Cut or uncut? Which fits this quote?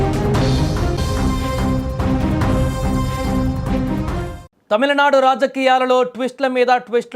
cut